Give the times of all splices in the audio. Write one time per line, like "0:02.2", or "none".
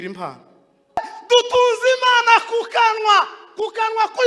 0:01.1